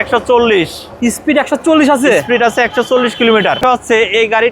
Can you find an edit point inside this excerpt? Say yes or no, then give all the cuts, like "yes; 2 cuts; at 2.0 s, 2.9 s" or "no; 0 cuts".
yes; 1 cut; at 3.6 s